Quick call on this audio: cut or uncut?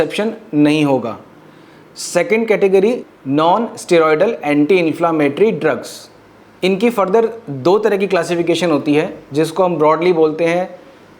uncut